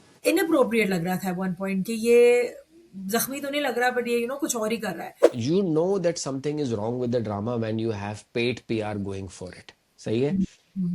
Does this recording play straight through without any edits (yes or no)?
no